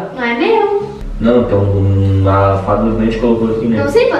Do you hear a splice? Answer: yes; 1 cut; at 1.0 s

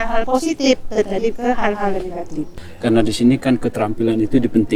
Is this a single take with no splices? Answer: no; 1 cut; at 2.7 s

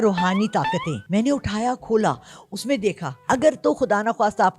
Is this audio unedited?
no; 2 cuts; at 1.0 s, 3.1 s

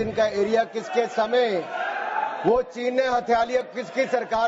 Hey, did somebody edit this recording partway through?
no; 0 cuts

